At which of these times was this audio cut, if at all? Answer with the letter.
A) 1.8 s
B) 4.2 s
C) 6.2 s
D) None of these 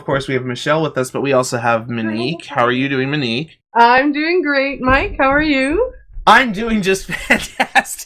D